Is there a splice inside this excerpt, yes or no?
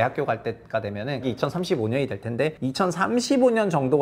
yes